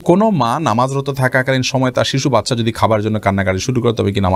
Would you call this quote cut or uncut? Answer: uncut